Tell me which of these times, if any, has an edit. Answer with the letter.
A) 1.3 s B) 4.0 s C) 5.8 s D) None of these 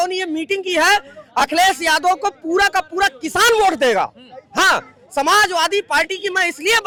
D